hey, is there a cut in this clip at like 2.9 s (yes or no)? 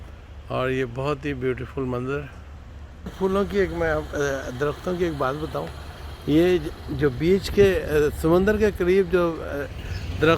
yes